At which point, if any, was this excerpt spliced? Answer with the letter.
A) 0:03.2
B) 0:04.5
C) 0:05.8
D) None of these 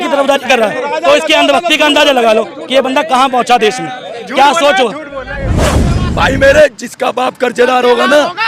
C